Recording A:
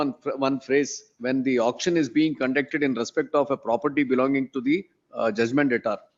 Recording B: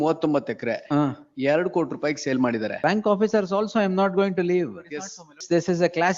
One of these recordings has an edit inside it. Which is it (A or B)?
B